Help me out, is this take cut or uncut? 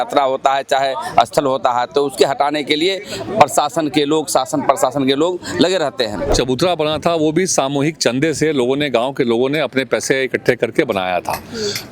cut